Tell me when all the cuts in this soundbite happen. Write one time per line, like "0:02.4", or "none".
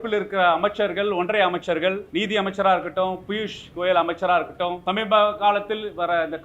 0:02.0
0:04.8